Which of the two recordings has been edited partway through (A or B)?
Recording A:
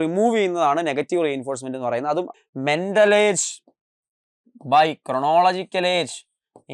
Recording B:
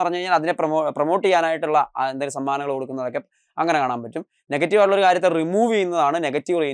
A